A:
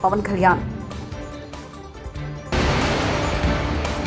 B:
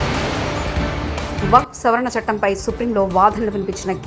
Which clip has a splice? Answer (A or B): B